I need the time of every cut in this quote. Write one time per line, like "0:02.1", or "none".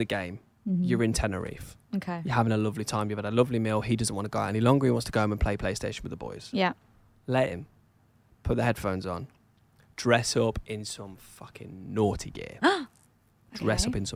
none